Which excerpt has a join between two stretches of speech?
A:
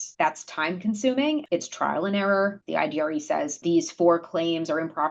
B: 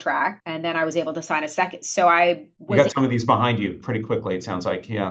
A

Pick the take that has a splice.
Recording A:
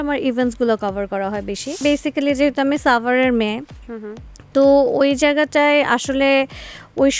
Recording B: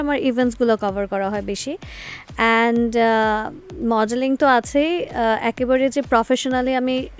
A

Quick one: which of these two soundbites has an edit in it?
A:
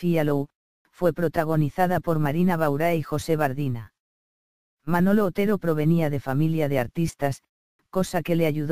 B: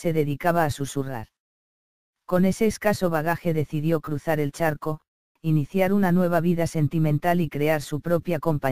A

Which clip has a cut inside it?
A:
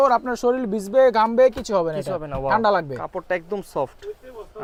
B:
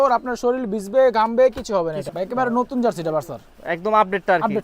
B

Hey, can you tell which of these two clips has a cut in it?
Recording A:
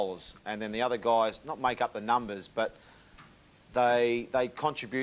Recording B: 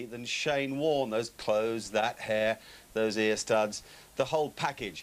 A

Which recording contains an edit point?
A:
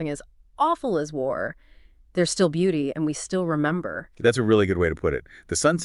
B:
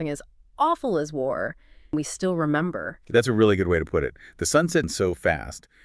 B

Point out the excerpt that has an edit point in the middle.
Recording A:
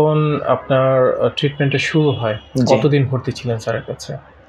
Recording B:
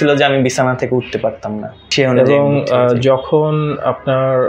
B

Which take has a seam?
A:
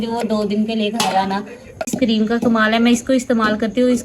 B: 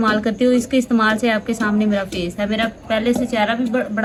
A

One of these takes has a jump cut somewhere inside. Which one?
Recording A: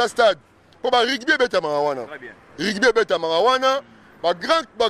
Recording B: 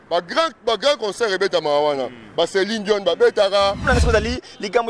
B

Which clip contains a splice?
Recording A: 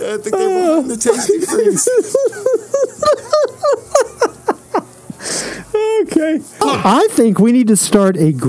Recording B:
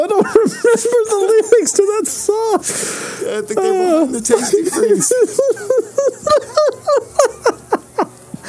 A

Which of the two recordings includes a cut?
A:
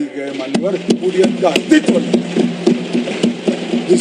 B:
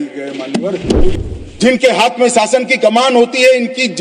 B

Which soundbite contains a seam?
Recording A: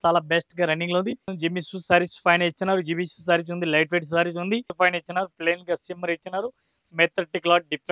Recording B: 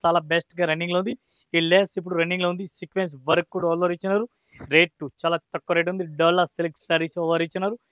A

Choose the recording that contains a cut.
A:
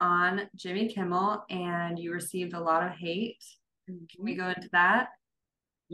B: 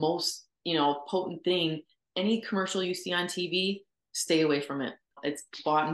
B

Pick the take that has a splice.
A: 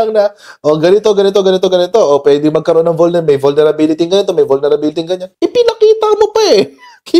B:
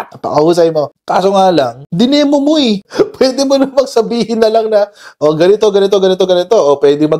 B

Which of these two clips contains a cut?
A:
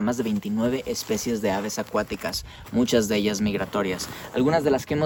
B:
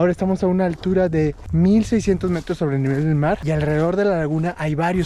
B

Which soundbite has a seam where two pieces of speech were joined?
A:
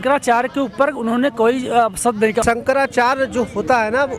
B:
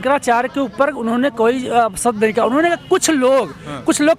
A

